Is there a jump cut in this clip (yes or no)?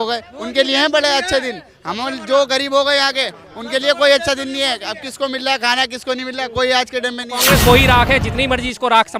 yes